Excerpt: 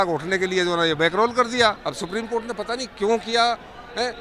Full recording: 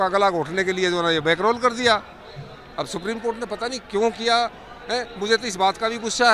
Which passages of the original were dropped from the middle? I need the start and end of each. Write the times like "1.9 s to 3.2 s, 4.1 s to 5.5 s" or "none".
2.1 s to 2.7 s